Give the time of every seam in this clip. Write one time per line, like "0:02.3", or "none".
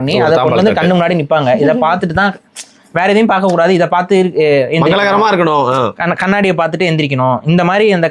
none

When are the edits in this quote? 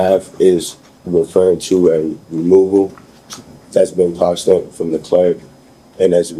none

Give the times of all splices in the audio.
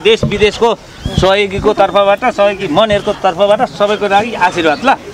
none

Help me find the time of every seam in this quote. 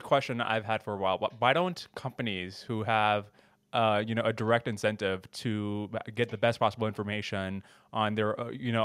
none

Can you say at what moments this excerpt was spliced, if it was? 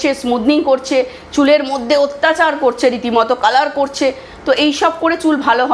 none

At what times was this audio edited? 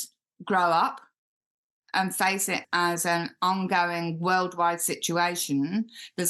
0:02.6

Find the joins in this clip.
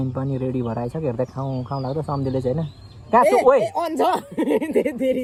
none

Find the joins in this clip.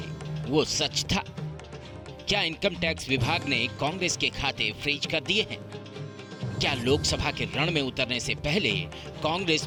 none

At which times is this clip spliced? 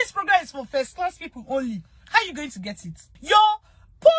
0:03.1

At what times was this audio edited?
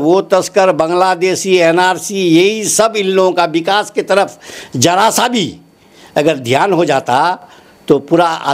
none

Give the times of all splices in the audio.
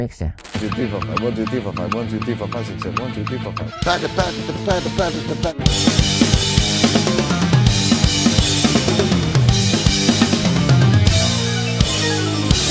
none

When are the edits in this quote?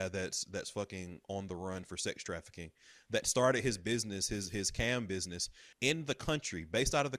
none

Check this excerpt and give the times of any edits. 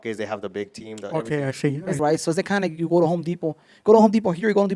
0:01.9

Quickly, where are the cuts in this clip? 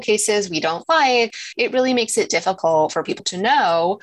0:01.3

